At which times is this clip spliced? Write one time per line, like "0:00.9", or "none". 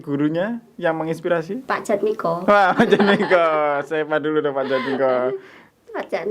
0:01.6